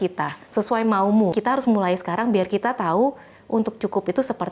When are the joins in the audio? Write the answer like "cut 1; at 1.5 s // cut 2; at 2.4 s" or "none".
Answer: cut 1; at 1.3 s